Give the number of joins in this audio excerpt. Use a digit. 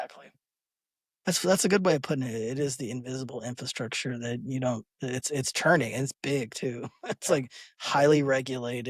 0